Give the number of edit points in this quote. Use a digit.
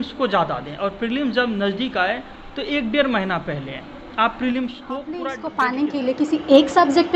1